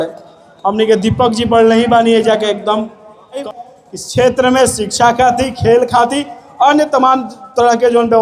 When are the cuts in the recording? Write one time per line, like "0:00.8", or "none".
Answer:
0:03.4

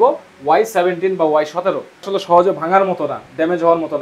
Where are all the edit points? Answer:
0:02.1

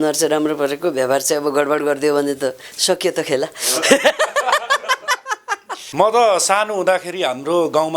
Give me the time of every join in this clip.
0:05.8

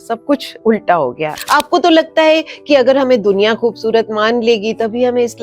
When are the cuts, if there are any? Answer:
0:01.4

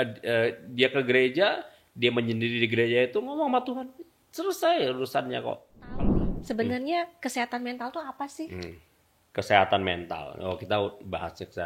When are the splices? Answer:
0:06.0

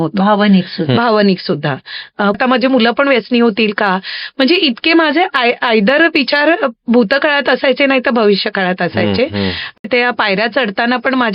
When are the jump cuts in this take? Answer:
0:02.4
0:09.8

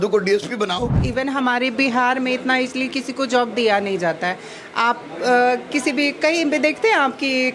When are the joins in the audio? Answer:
0:00.9

